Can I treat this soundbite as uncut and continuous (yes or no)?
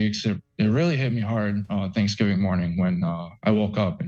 yes